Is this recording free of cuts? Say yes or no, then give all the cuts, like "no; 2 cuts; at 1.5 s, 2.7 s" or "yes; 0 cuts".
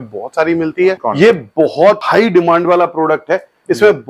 no; 2 cuts; at 1.0 s, 2.0 s